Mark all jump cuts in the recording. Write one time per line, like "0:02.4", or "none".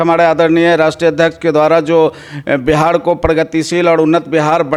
none